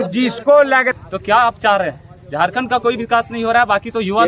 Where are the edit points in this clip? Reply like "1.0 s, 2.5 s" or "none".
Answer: 0.9 s